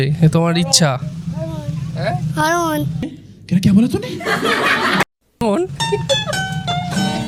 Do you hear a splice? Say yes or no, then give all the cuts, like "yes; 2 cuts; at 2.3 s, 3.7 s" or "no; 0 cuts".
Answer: no; 0 cuts